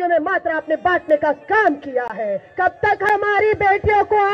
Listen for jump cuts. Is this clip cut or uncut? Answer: cut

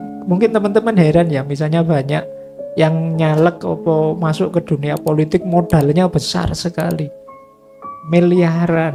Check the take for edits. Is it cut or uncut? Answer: uncut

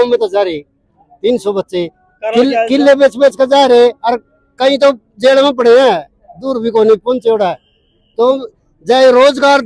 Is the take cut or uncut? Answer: uncut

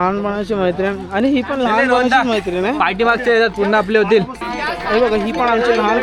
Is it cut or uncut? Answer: uncut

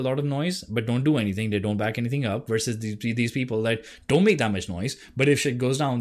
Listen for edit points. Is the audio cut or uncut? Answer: uncut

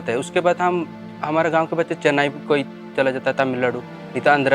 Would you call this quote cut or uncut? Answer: uncut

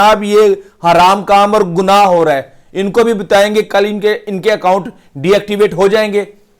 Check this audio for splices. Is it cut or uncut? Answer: uncut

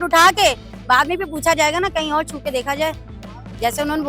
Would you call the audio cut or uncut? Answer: uncut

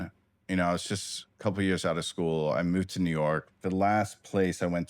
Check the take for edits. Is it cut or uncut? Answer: cut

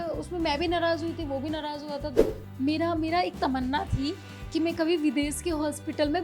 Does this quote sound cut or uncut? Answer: cut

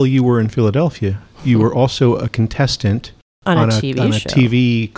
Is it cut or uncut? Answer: uncut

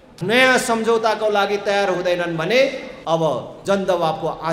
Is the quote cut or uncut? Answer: uncut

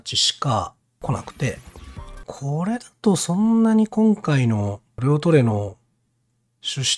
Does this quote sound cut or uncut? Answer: cut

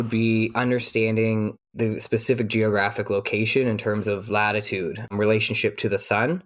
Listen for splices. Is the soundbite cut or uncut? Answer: uncut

